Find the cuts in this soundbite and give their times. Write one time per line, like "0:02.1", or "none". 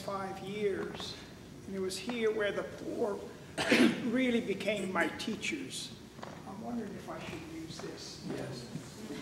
none

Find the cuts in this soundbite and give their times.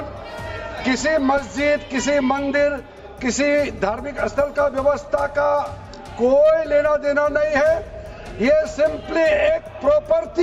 none

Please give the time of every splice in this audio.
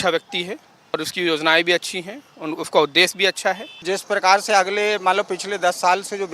0:00.9
0:03.8

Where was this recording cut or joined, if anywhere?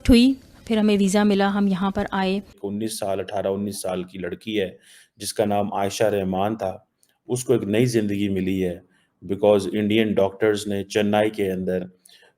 0:02.6

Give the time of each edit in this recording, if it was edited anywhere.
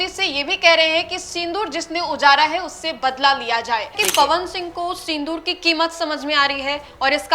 0:03.9

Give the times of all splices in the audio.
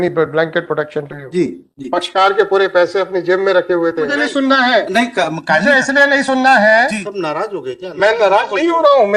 0:04.1
0:07.0

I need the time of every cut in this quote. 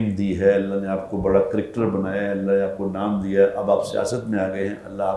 none

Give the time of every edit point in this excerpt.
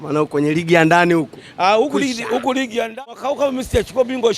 0:02.8

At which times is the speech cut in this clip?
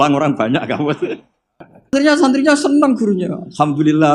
0:01.9

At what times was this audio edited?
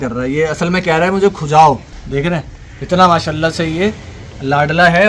0:01.9

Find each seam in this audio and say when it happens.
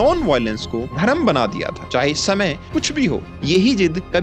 none

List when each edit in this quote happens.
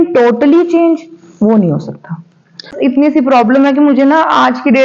0:02.7

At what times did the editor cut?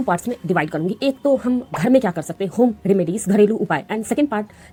none

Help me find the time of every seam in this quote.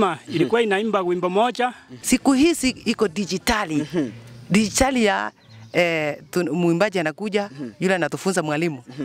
0:01.9

